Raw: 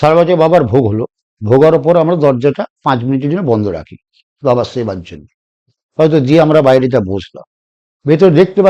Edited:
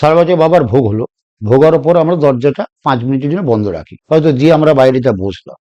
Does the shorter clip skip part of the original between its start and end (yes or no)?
yes